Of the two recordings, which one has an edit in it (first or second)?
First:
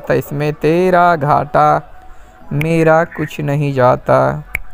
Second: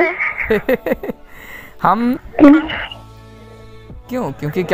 second